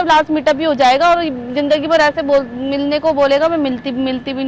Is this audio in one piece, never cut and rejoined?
yes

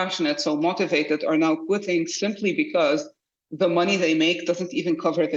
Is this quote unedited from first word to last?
yes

